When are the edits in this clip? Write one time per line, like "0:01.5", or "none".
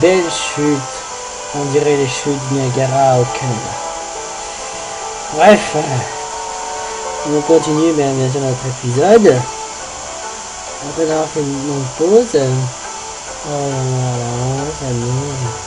none